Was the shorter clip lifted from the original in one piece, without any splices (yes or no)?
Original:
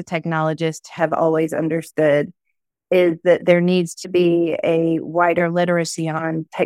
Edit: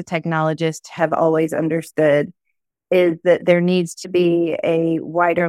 yes